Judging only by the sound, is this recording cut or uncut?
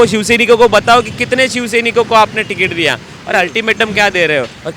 uncut